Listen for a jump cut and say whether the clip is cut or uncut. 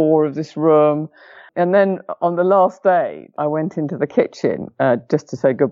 cut